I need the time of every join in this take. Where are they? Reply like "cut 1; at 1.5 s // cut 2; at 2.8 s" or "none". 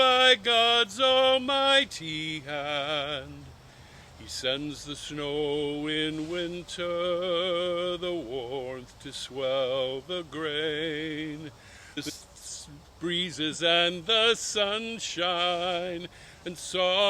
cut 1; at 12.0 s